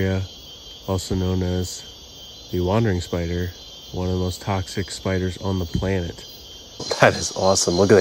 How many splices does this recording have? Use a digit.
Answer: 1